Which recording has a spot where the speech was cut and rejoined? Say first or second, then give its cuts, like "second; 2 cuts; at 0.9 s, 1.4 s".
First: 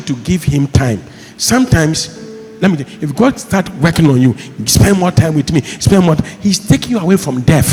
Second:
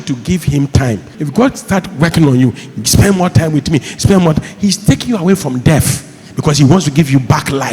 second; 1 cut; at 1.1 s